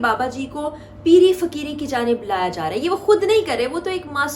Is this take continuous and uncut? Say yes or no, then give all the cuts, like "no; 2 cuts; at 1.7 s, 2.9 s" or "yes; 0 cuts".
yes; 0 cuts